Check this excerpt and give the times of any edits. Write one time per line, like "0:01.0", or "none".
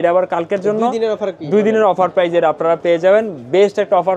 none